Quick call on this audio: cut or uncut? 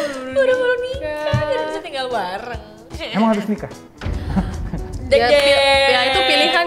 uncut